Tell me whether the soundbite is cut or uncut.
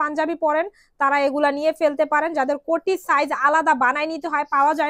uncut